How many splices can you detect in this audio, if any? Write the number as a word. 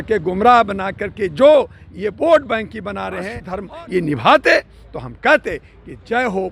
one